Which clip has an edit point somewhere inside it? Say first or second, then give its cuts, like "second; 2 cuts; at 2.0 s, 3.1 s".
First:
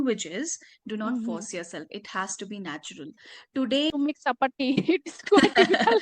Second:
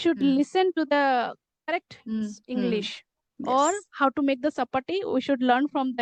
first; 1 cut; at 3.9 s